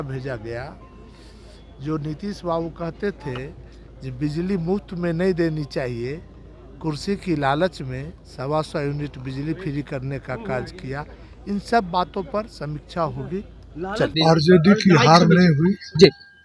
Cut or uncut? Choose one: cut